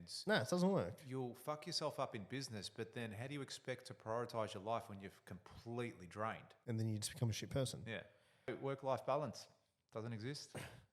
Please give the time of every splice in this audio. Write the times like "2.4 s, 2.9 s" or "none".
6.5 s, 8.5 s